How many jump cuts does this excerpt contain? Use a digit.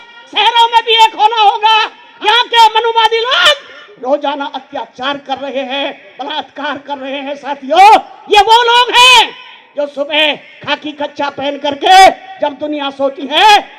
1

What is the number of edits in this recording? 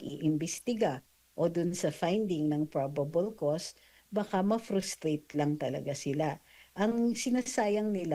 0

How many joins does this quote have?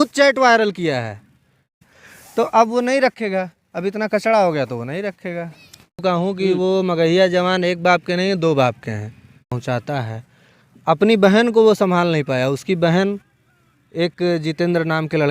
3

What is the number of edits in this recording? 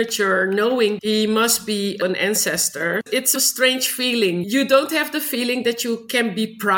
4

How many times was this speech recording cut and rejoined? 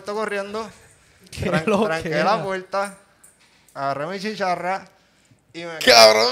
0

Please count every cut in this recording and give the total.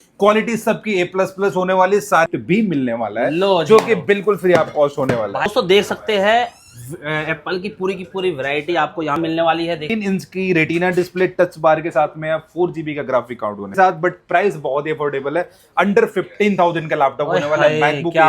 4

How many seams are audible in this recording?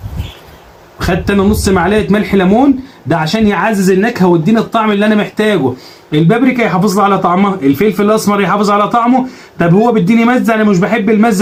0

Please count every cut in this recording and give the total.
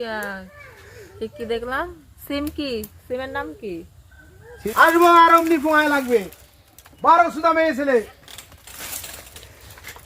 1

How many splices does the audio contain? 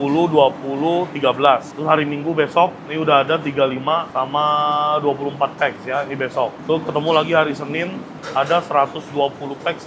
2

